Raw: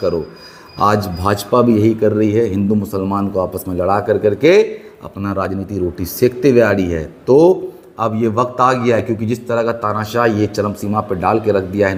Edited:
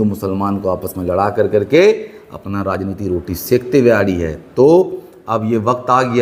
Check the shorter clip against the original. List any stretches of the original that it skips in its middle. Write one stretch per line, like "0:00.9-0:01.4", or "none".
none